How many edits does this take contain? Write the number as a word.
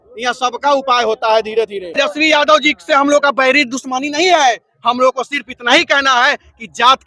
one